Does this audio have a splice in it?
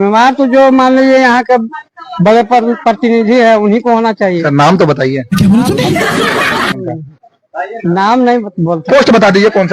no; 0 cuts

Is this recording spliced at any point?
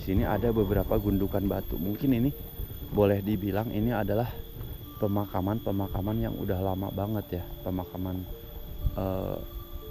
no; 0 cuts

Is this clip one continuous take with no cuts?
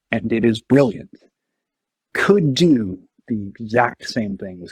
no; 1 cut; at 2.1 s

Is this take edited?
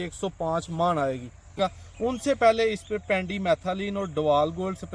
yes; 1 cut; at 1.6 s

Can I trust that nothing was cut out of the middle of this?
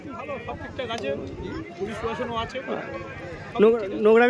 yes; 0 cuts

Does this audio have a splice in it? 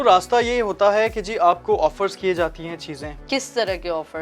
yes; 1 cut; at 3.1 s

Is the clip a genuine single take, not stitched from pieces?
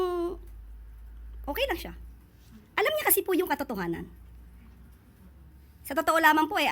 yes; 0 cuts

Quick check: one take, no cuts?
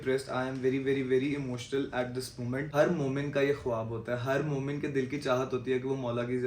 no; 1 cut; at 2.7 s

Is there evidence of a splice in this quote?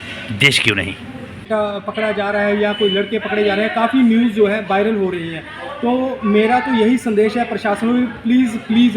yes; 1 cut; at 1.5 s

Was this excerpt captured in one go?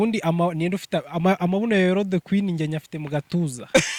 yes; 0 cuts

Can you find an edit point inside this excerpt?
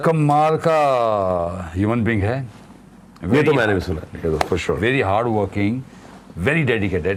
no; 0 cuts

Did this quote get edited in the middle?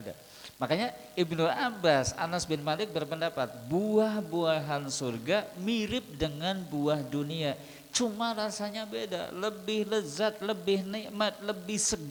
no; 0 cuts

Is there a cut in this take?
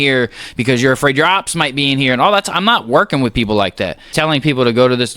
yes; 1 cut; at 4.1 s

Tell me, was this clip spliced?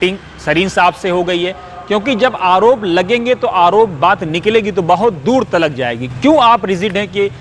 no; 0 cuts

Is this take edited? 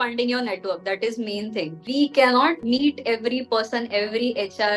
yes; 2 cuts; at 1.8 s, 2.6 s

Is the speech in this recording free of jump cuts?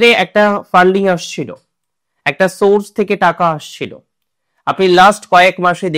yes; 0 cuts

